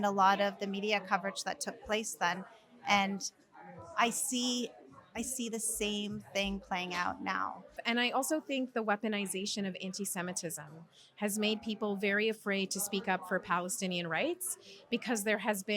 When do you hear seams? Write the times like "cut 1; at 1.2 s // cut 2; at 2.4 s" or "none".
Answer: cut 1; at 7.8 s